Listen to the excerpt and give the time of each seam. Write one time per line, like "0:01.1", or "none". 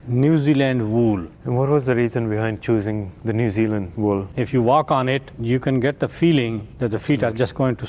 0:01.3
0:03.1
0:04.2
0:05.3
0:06.7